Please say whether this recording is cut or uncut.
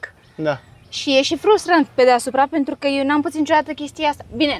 uncut